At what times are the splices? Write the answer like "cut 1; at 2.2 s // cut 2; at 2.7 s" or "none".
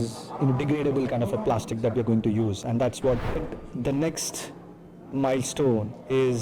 cut 1; at 3.5 s